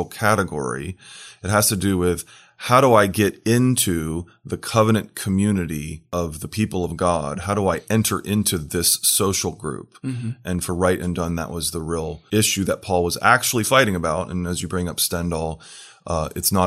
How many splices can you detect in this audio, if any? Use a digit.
2